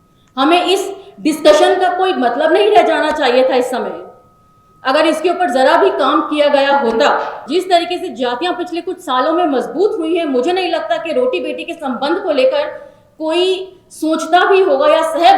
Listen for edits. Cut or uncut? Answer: cut